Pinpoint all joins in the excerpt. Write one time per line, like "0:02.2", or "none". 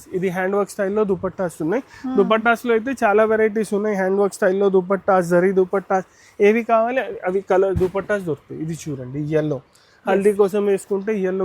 none